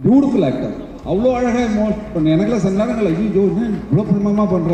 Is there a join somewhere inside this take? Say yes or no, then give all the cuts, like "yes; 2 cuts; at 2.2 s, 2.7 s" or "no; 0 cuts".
no; 0 cuts